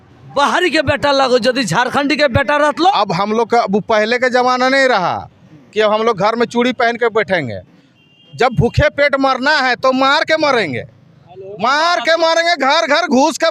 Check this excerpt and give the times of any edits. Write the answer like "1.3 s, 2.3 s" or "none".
2.7 s

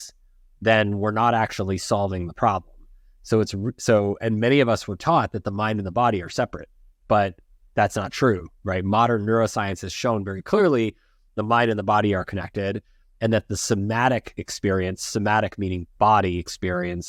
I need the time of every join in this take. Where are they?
none

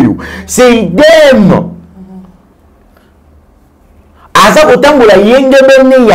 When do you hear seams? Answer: none

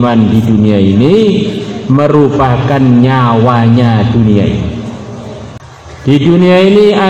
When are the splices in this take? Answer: 5.6 s

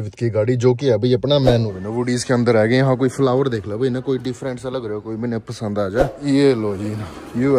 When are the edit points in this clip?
1.7 s, 6.2 s

